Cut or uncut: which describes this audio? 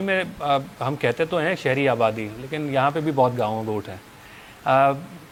uncut